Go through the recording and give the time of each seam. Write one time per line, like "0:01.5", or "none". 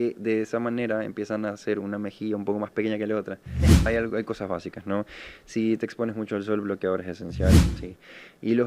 0:03.8
0:07.8